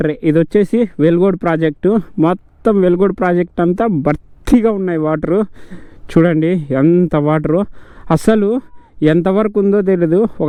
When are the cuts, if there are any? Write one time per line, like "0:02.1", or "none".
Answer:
none